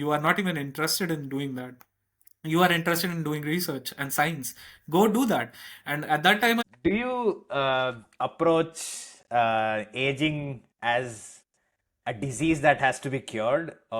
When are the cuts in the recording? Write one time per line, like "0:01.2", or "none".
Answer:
0:06.6